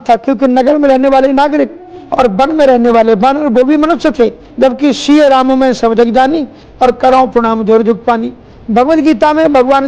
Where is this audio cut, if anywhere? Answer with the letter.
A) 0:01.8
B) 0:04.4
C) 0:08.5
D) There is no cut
B